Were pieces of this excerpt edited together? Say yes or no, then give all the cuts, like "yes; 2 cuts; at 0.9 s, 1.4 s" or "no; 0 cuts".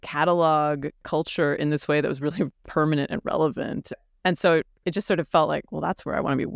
yes; 1 cut; at 4.0 s